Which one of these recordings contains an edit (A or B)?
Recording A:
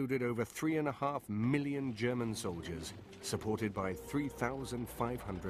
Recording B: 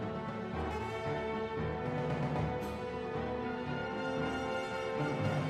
A